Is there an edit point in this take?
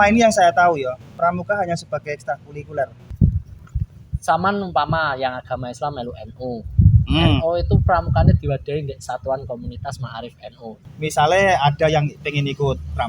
yes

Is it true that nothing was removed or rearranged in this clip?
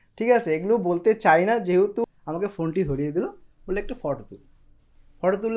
no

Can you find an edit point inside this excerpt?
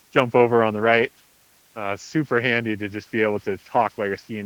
no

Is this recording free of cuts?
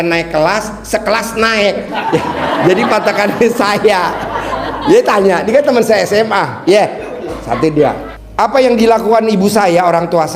no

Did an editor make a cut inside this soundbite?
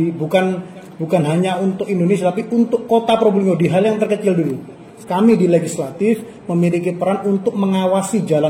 yes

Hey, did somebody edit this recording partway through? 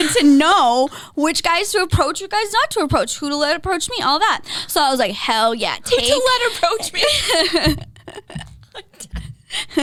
no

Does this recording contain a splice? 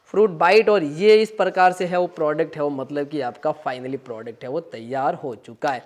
no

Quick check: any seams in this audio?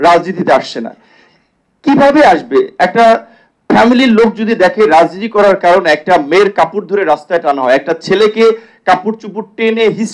no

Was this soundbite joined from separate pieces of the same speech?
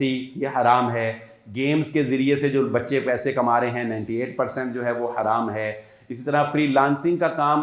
no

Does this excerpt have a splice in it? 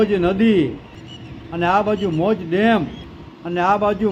no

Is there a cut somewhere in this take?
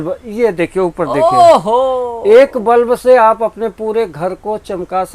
no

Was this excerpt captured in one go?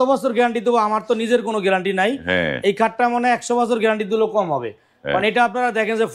yes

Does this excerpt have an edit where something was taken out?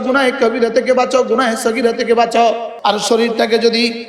yes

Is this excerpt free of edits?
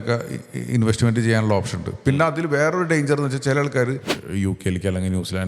no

